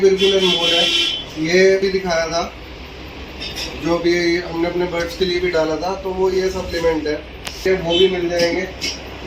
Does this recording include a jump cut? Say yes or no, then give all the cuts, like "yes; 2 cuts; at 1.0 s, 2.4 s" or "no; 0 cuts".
yes; 2 cuts; at 1.8 s, 7.6 s